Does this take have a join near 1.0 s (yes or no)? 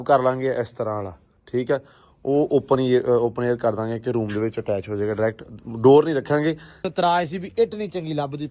no